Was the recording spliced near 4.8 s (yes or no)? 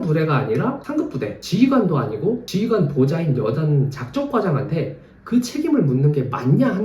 no